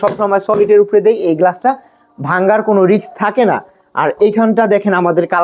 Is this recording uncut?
yes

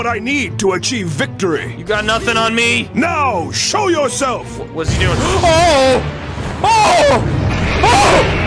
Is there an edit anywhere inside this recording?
no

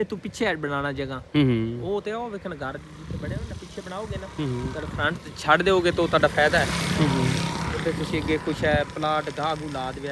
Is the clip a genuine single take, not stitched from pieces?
yes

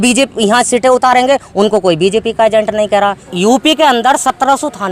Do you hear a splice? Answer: yes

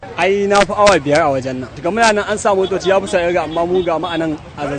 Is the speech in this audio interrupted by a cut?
no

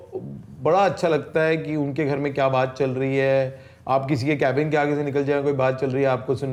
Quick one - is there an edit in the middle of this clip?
no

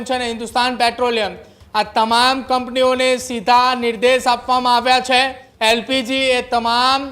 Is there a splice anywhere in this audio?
yes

